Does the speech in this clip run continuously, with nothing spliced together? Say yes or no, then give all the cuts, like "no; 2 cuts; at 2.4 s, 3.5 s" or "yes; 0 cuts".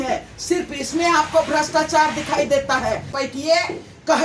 no; 1 cut; at 3.1 s